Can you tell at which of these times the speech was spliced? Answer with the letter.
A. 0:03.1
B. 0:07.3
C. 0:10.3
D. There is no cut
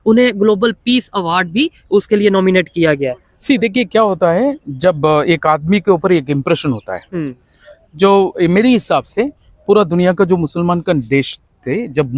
D